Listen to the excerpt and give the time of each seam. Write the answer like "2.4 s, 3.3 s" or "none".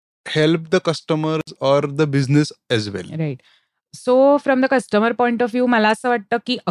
none

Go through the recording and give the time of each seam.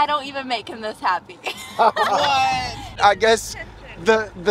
2.9 s

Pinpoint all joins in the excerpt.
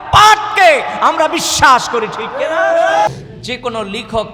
3.1 s

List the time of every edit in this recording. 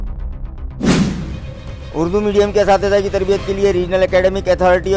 1.3 s

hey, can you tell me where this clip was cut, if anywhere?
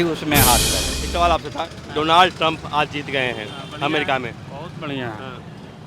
0.9 s

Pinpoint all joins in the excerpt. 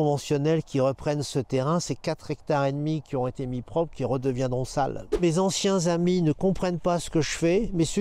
5.2 s

